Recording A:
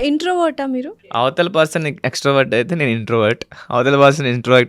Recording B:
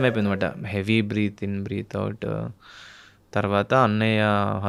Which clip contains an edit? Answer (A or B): A